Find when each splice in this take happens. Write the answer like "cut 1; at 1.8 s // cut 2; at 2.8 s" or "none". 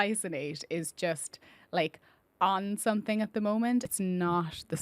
cut 1; at 3.9 s